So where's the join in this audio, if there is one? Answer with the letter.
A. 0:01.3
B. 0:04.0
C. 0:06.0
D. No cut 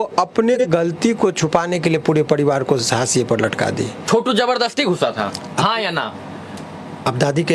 B